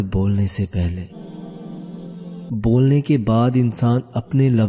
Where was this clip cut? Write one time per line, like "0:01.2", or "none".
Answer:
0:01.1
0:02.4